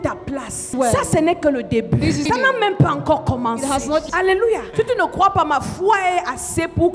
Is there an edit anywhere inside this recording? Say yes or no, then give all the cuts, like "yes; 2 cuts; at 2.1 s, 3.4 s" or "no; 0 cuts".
no; 0 cuts